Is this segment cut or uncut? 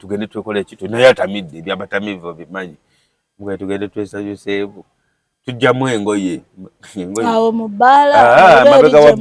uncut